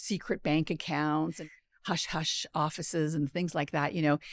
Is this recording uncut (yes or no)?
no